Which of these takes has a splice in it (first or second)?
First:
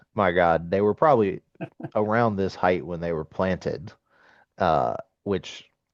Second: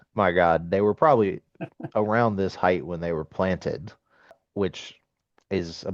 second